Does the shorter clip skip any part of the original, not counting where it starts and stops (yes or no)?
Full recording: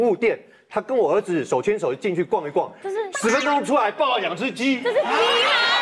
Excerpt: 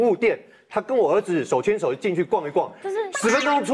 no